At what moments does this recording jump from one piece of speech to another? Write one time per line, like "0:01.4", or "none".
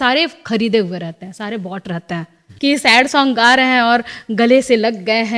0:02.4